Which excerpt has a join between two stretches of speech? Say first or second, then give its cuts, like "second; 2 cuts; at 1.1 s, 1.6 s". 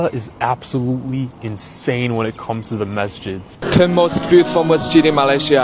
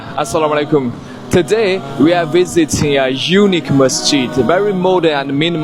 first; 1 cut; at 3.6 s